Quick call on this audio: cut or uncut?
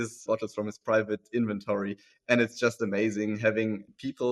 uncut